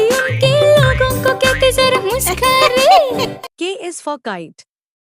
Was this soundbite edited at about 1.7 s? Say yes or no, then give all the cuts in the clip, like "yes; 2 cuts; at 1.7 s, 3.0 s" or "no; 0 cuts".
no; 1 cut; at 3.2 s